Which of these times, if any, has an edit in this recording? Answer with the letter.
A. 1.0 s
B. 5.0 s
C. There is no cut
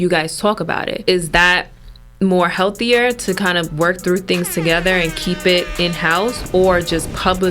A